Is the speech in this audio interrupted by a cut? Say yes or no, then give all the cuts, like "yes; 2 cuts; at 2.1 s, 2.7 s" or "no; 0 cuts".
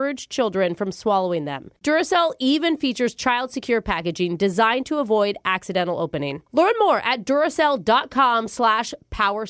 no; 0 cuts